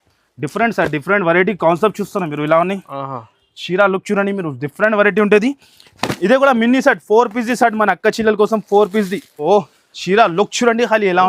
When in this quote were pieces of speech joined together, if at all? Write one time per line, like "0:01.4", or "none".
0:09.4